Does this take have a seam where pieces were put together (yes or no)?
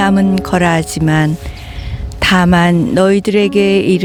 no